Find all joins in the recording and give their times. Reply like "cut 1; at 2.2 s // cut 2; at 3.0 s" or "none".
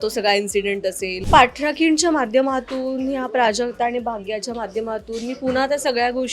cut 1; at 1.1 s